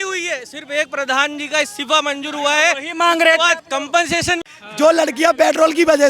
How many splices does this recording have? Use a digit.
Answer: 1